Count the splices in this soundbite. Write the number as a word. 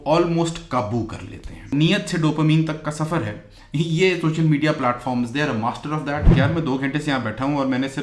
two